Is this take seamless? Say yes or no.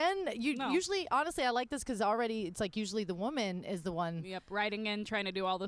yes